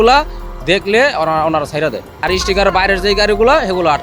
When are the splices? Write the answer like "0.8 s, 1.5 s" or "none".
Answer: 2.2 s